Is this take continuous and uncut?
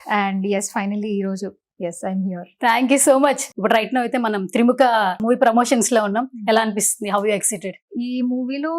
no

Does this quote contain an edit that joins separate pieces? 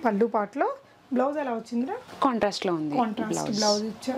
no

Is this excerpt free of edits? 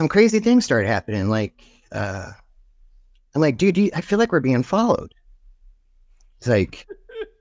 yes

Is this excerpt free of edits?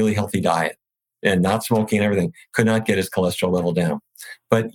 no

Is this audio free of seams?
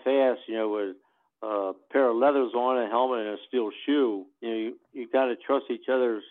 no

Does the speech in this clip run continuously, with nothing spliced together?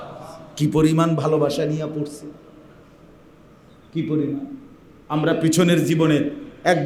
yes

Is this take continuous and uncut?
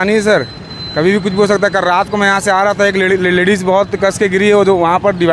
yes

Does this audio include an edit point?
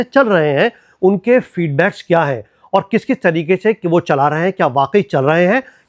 no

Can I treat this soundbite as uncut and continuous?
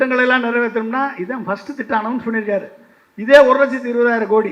yes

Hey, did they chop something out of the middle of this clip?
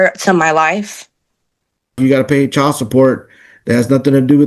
yes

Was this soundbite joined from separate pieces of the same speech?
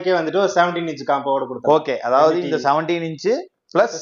no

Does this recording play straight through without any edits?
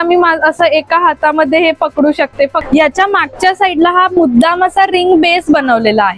no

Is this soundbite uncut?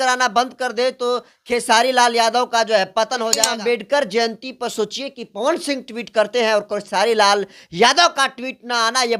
no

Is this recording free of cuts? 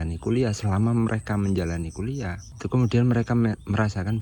yes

